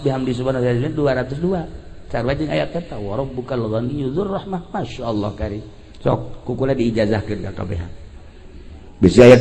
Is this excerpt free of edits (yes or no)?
yes